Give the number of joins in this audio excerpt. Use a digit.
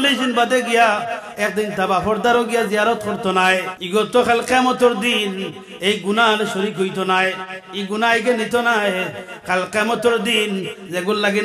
1